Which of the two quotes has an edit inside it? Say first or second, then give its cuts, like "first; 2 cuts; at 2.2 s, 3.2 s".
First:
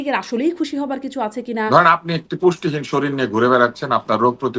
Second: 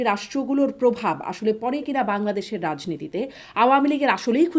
first; 1 cut; at 1.7 s